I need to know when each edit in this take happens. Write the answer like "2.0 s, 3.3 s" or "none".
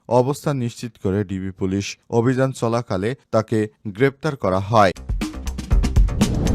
5.1 s